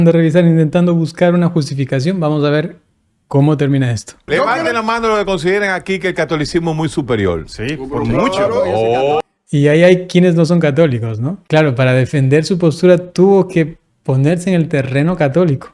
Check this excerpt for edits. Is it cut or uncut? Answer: cut